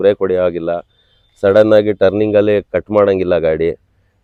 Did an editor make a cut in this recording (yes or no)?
no